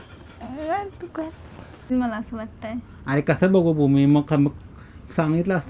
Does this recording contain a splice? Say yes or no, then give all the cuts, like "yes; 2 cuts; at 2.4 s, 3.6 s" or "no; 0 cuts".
yes; 1 cut; at 1.9 s